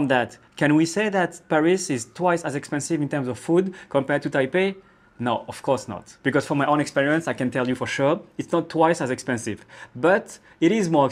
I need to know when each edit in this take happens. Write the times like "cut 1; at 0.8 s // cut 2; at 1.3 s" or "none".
none